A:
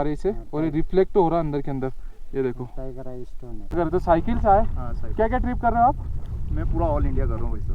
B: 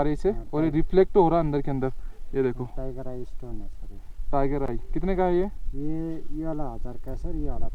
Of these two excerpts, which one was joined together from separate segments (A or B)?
A